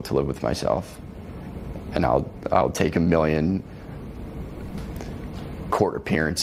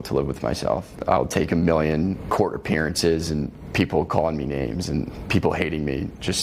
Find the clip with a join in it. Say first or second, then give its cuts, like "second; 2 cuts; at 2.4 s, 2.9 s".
second; 4 cuts; at 0.9 s, 2.2 s, 3.6 s, 5.2 s